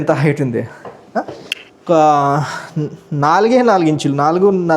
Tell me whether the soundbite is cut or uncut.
uncut